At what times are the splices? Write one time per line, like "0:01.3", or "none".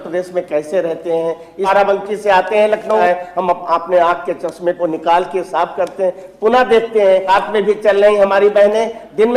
0:01.7
0:03.0
0:07.3